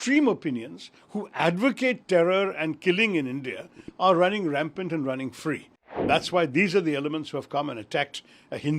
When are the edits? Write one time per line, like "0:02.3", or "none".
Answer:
0:06.0